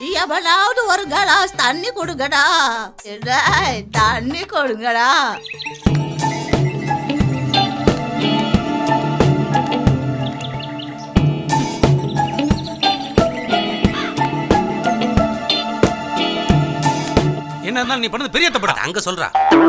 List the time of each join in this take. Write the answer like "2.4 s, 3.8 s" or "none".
none